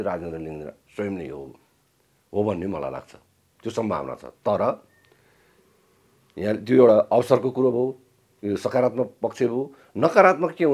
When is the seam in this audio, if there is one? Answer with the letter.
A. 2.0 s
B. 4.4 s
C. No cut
C